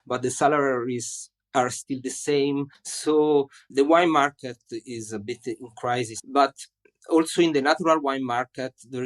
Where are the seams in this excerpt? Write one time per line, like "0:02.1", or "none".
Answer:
0:06.2